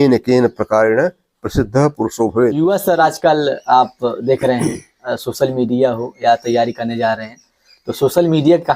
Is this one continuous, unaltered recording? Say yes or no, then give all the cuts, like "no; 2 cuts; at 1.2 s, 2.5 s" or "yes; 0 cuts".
no; 1 cut; at 2.6 s